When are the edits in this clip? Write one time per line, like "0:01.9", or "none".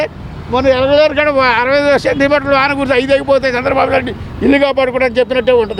none

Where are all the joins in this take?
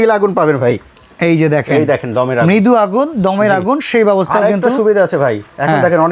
0:00.9

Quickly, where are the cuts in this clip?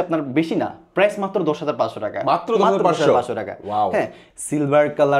0:04.2

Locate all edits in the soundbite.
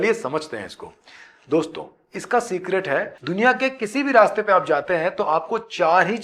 0:03.1

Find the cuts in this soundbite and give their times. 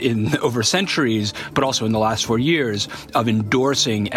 none

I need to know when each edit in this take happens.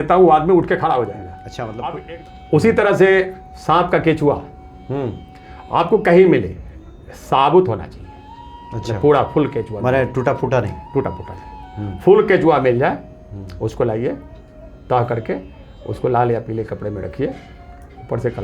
0:01.9

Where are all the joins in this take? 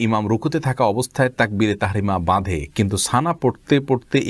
none

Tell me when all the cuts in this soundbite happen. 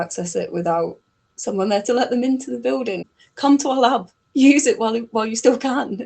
0:03.1

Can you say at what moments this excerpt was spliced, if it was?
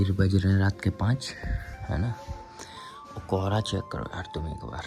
none

